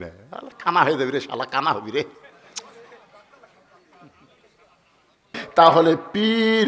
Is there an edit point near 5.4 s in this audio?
yes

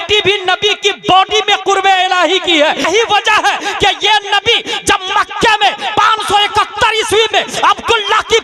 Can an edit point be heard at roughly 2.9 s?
yes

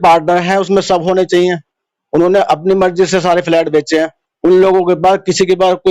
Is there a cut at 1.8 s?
no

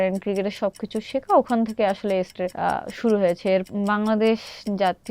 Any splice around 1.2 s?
no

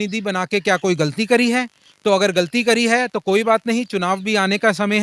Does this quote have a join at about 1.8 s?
no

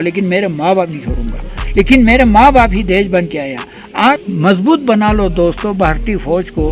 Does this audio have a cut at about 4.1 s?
yes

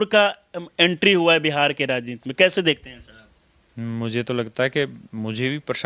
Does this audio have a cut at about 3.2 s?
no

